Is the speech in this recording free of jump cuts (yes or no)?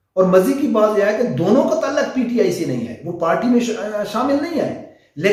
yes